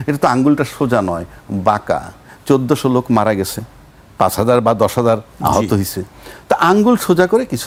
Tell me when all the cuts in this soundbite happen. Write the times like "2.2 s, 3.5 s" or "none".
none